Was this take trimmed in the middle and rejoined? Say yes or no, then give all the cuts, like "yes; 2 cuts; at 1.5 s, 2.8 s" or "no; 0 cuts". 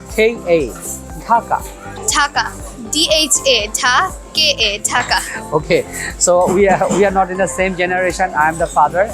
yes; 1 cut; at 2.0 s